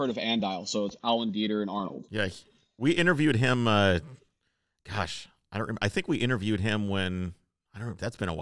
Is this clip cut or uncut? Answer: uncut